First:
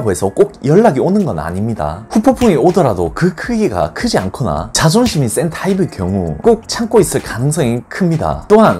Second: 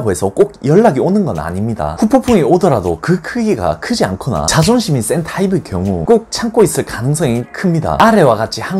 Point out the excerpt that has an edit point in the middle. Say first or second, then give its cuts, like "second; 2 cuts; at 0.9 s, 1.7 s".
second; 4 cuts; at 1.9 s, 4.5 s, 6.0 s, 7.9 s